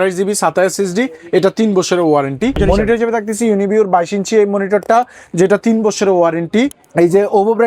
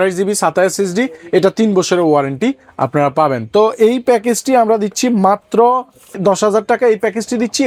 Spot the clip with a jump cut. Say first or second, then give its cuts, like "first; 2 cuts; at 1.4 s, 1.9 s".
first; 2 cuts; at 2.6 s, 6.8 s